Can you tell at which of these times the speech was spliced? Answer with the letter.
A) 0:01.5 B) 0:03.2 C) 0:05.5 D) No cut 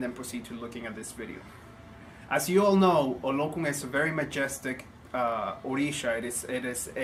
D